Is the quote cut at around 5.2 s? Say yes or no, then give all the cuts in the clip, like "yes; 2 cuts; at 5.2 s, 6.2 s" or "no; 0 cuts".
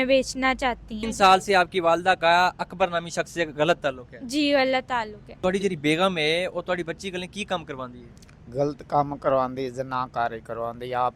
yes; 2 cuts; at 1.0 s, 5.2 s